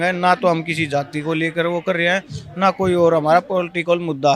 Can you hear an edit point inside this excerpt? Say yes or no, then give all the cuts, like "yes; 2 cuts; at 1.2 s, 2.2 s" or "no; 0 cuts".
no; 0 cuts